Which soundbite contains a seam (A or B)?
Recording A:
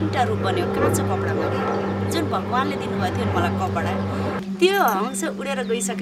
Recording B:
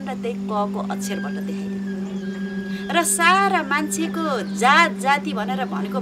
A